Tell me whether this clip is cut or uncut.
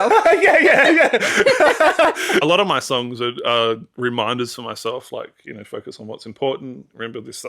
cut